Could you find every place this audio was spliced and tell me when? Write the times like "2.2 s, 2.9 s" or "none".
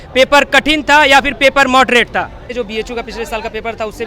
2.5 s